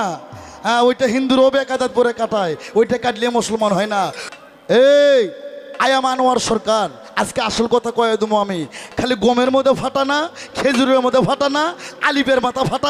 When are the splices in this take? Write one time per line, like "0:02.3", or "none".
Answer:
0:04.3